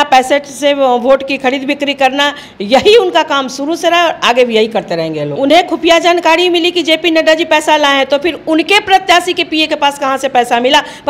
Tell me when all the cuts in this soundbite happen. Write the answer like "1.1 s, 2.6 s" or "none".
5.3 s